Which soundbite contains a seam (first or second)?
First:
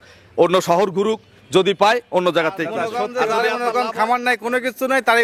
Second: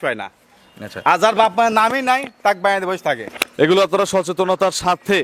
first